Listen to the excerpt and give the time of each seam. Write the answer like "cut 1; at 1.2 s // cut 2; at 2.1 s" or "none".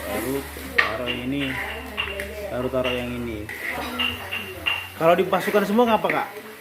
cut 1; at 3.7 s